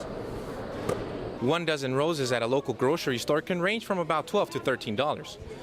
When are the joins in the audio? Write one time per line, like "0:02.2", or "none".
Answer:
0:01.3